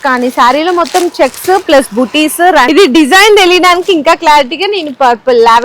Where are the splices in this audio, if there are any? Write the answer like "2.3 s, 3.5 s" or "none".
2.7 s